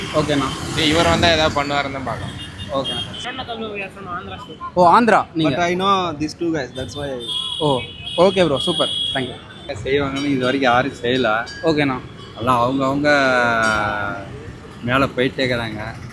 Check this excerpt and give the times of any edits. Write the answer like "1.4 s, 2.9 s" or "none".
3.2 s, 9.6 s